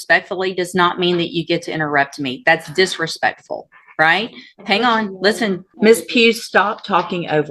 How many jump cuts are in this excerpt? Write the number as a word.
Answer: one